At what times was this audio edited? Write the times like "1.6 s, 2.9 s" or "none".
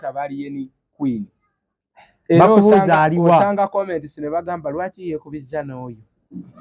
none